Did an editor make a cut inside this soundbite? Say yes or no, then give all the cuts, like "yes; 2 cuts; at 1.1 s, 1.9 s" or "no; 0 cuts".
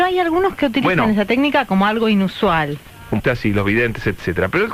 no; 0 cuts